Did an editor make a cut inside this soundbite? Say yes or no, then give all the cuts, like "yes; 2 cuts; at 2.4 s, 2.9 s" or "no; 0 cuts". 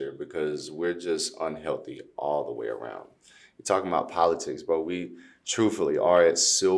no; 0 cuts